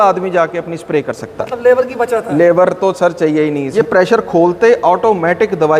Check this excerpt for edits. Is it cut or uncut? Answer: cut